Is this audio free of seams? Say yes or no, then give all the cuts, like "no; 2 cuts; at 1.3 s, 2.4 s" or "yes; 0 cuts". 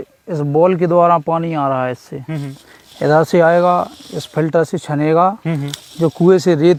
yes; 0 cuts